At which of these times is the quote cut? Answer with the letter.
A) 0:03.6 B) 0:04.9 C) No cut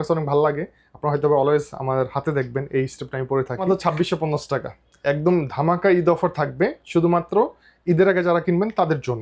A